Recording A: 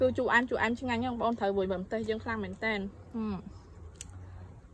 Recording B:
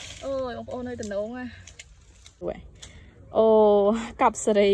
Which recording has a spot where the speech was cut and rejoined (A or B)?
B